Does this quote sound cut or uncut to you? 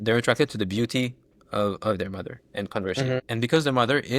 cut